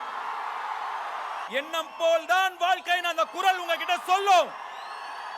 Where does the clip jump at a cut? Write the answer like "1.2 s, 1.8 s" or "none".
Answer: 1.5 s